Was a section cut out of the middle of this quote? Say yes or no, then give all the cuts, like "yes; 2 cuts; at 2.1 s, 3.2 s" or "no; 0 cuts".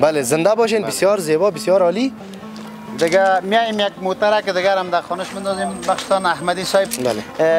no; 0 cuts